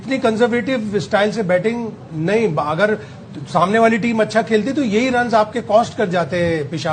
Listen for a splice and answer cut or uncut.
uncut